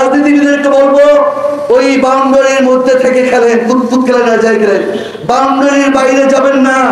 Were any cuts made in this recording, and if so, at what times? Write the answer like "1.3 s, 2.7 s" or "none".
none

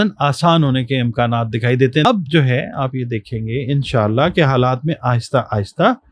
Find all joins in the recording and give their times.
2.1 s

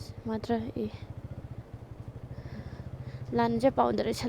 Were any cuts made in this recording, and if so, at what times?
none

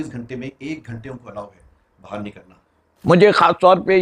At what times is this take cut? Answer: 3.1 s

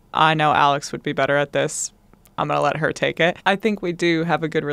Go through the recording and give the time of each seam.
none

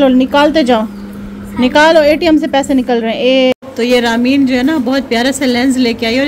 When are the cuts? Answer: 3.5 s

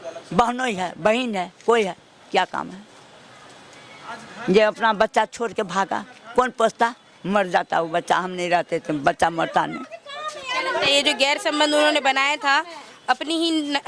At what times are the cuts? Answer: none

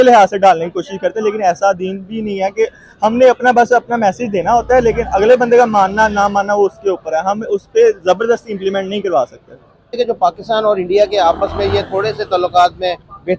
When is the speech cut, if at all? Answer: 10.0 s

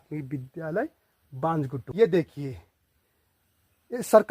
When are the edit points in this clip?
1.8 s

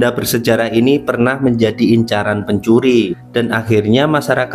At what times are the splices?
3.2 s

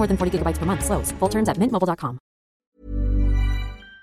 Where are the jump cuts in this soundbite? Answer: 2.6 s

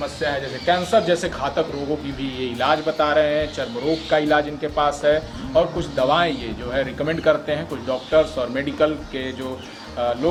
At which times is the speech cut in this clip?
none

